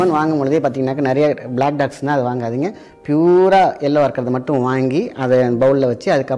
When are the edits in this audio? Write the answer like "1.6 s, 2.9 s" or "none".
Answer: none